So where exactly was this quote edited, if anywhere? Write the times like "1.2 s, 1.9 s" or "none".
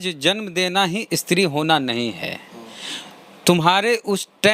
none

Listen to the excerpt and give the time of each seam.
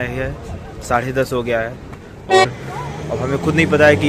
2.5 s

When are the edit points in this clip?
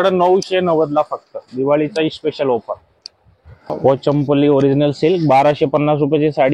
3.7 s

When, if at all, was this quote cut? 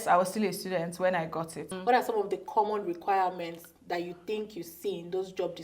1.7 s

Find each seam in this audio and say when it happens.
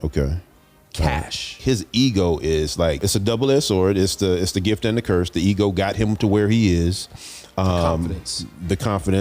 1.6 s, 3.0 s

